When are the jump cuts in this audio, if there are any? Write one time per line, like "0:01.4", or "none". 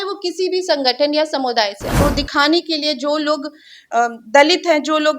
0:02.0